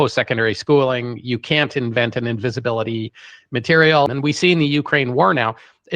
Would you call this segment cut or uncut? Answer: cut